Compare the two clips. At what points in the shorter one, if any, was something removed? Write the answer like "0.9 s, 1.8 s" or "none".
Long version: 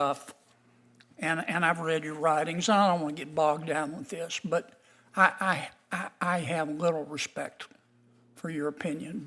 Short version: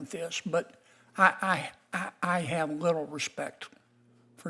none